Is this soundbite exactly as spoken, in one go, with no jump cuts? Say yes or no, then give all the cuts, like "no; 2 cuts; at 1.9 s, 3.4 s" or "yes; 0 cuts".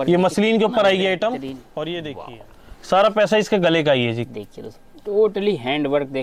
no; 1 cut; at 2.1 s